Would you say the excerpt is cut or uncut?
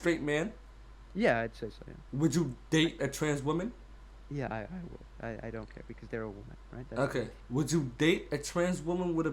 cut